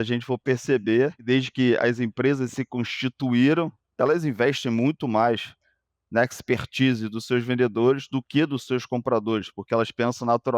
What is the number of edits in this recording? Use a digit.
1